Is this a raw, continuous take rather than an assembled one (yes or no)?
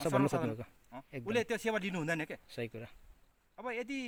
yes